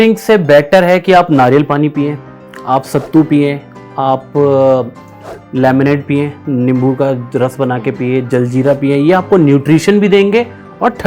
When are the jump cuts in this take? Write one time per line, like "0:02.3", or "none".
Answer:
none